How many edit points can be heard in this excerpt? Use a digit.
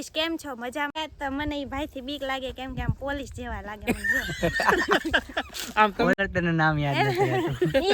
2